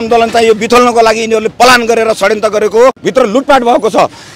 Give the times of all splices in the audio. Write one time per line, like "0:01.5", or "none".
0:03.0

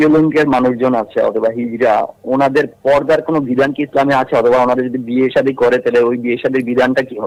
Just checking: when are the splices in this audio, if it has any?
none

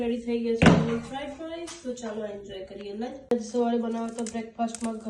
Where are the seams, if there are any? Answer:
0:03.2

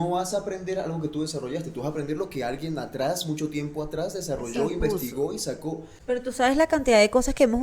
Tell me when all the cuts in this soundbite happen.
0:05.9

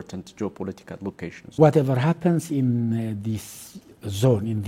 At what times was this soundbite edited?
0:01.6

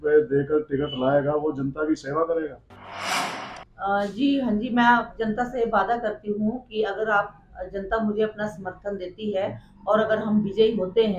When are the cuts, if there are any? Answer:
0:03.1

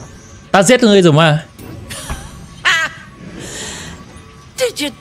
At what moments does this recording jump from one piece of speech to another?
0:01.5

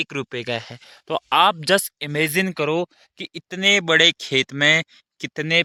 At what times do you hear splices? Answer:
none

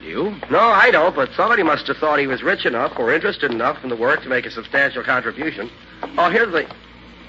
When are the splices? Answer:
0:03.3

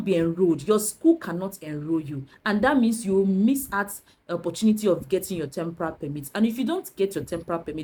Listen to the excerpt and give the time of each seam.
none

